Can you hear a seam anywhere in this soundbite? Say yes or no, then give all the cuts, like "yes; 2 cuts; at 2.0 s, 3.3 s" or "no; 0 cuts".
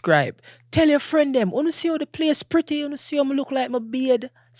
no; 0 cuts